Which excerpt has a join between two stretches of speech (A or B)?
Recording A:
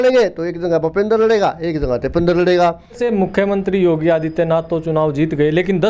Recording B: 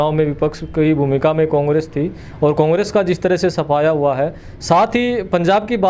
A